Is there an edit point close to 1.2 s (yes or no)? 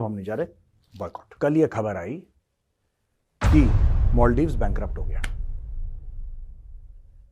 yes